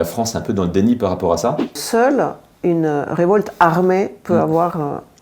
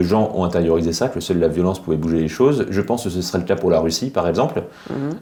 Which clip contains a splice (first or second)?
first